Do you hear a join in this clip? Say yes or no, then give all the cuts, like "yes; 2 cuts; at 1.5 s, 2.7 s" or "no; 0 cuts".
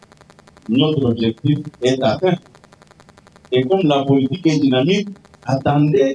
no; 0 cuts